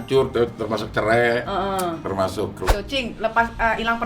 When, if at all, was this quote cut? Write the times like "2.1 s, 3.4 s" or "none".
2.8 s